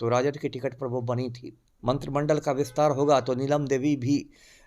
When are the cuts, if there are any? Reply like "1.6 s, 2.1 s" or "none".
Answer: 1.6 s